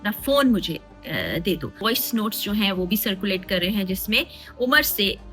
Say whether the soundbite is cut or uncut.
cut